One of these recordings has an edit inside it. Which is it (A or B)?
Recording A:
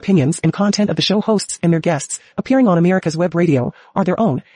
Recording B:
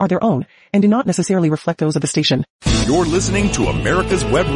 B